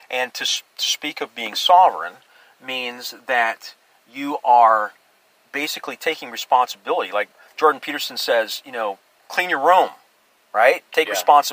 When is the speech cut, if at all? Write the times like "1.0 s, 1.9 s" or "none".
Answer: 7.3 s, 9.1 s